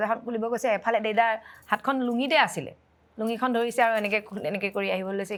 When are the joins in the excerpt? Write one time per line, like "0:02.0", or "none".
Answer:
none

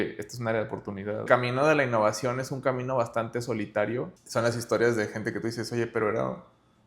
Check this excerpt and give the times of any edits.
0:01.2
0:04.2

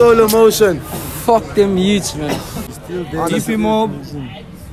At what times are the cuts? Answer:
0:02.6

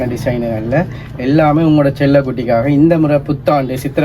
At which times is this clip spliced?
none

